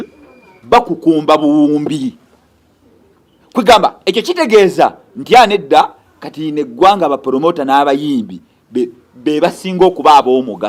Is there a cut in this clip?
no; 0 cuts

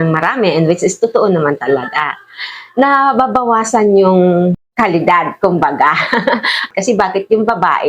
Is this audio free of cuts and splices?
no; 2 cuts; at 4.6 s, 6.7 s

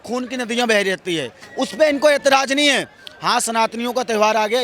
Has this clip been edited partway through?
yes; 1 cut; at 1.4 s

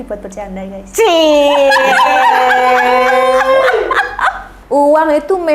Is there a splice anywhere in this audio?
yes; 1 cut; at 4.5 s

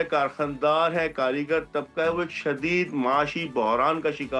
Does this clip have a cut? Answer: no; 0 cuts

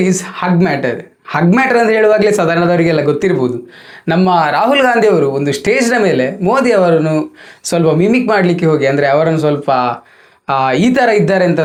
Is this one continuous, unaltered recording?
yes; 0 cuts

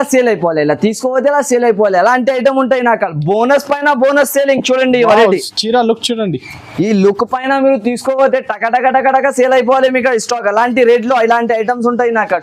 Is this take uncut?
yes; 0 cuts

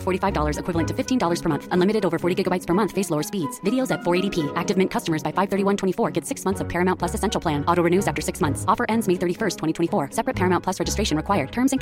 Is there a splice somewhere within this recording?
no; 0 cuts

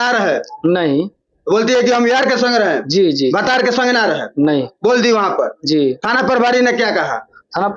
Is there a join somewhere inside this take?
no; 0 cuts

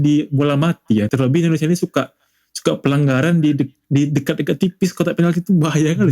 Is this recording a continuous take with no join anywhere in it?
no; 1 cut; at 1.1 s

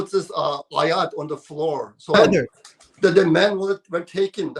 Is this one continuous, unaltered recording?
no; 1 cut; at 2.1 s

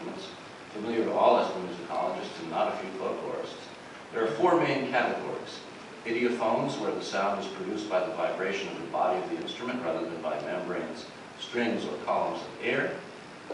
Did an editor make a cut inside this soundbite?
no; 0 cuts

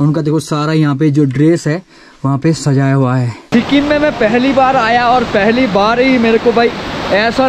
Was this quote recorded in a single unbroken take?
no; 1 cut; at 3.4 s

